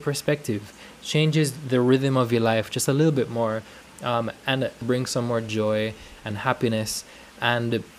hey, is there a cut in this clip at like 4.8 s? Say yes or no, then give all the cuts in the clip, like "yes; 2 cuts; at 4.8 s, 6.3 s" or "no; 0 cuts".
yes; 1 cut; at 4.8 s